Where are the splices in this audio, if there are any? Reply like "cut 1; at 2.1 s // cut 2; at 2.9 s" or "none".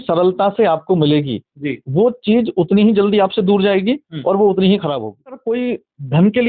cut 1; at 5.4 s